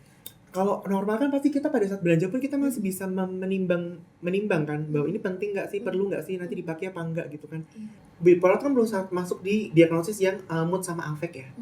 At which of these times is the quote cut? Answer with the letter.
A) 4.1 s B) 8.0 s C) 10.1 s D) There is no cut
B